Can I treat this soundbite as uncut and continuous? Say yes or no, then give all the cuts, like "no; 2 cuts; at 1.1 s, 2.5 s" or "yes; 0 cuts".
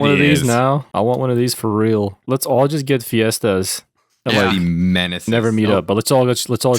no; 1 cut; at 2.2 s